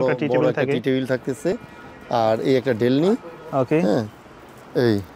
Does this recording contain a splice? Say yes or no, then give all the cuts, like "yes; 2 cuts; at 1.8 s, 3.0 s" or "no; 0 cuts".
no; 0 cuts